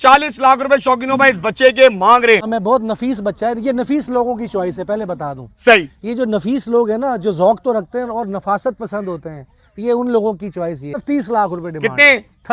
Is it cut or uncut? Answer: cut